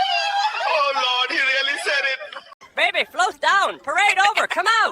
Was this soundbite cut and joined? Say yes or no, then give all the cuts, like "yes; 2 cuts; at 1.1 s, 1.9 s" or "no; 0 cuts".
yes; 1 cut; at 2.6 s